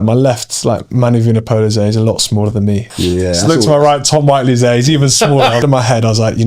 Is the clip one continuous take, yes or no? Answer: no